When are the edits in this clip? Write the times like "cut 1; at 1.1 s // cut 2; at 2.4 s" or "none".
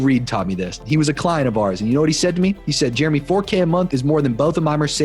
cut 1; at 2.7 s // cut 2; at 3.9 s